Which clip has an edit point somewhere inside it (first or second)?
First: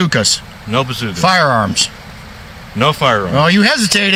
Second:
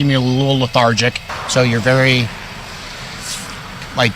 second